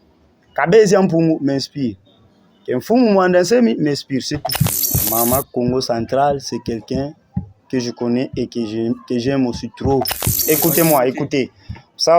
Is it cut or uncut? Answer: cut